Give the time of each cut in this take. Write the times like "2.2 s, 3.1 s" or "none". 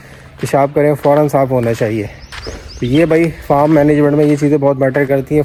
none

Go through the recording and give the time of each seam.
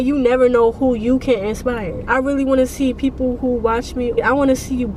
2.1 s, 4.2 s

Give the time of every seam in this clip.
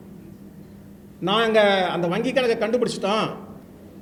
none

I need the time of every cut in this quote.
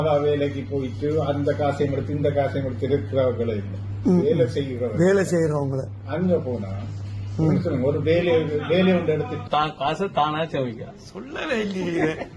9.4 s

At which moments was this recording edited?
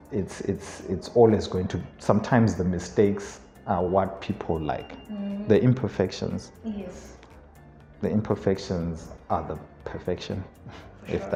none

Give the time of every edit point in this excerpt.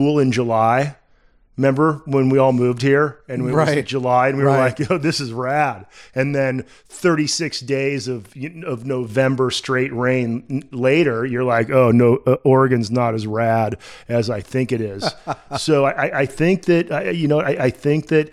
none

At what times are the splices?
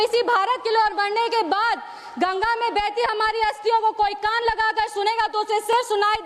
none

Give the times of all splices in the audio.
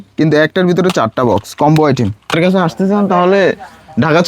2.4 s

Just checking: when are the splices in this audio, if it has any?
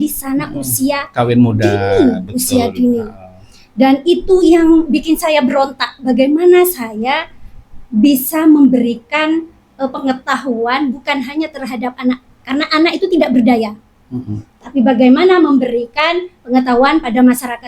none

